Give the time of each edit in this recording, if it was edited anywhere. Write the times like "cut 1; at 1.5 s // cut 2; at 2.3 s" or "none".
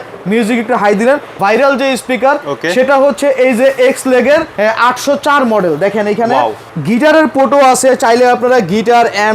cut 1; at 1.4 s // cut 2; at 6.7 s